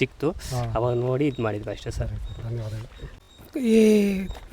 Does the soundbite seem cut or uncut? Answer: cut